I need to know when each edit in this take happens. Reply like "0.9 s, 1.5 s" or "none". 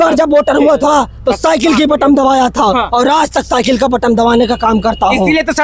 none